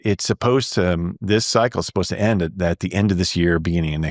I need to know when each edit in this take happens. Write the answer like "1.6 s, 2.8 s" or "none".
none